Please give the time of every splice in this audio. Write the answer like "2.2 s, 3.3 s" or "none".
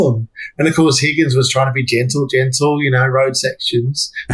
none